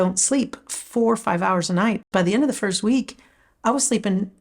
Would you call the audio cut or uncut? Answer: cut